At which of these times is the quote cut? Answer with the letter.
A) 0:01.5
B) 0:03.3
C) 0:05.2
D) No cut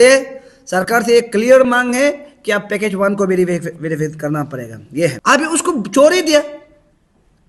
C